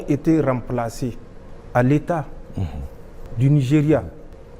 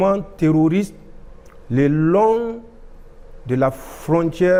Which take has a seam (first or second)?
first